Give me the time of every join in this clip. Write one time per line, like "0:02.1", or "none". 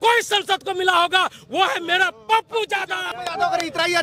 0:03.0